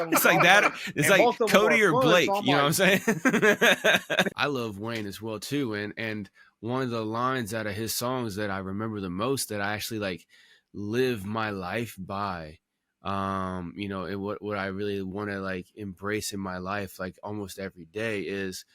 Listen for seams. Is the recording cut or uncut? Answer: cut